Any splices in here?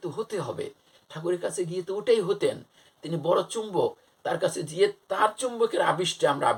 no; 0 cuts

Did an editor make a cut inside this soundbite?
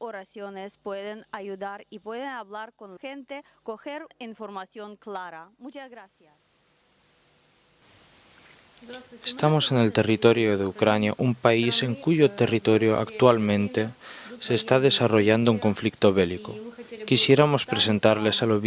no; 0 cuts

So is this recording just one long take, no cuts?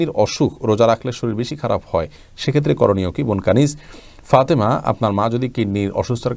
yes; 0 cuts

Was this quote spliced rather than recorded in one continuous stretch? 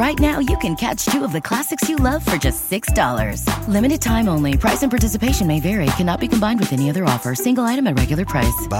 no; 0 cuts

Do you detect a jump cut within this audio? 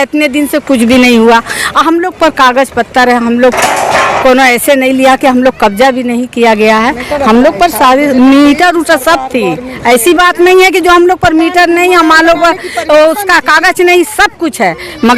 no; 0 cuts

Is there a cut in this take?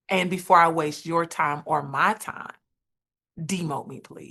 no; 0 cuts

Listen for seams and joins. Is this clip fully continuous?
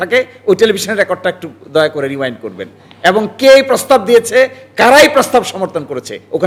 yes; 0 cuts

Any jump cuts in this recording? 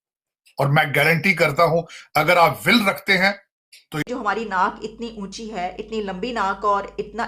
no; 0 cuts

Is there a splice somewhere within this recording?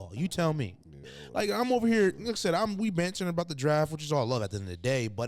yes; 1 cut; at 1.1 s

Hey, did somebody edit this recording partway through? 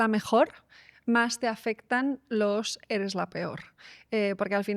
no; 0 cuts

